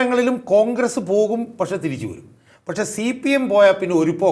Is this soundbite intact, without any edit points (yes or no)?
yes